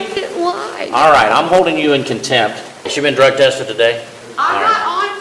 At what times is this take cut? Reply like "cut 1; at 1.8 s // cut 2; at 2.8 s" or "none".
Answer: cut 1; at 2.8 s // cut 2; at 4.2 s